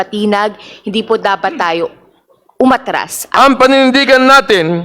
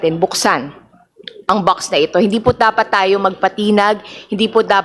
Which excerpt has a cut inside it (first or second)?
first